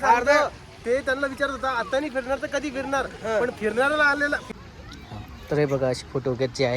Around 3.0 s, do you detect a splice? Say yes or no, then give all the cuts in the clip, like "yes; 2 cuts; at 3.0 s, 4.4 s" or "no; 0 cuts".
no; 1 cut; at 4.4 s